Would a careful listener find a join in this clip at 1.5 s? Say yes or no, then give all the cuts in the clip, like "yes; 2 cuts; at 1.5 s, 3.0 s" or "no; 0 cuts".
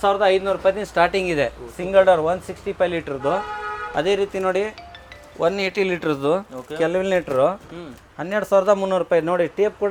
no; 0 cuts